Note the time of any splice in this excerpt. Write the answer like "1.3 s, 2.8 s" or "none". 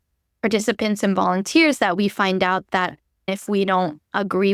3.3 s